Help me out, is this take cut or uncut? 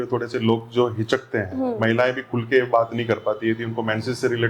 uncut